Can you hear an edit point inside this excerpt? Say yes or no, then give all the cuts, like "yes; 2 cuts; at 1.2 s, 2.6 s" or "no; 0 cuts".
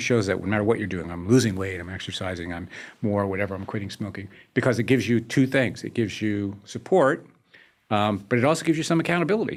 no; 0 cuts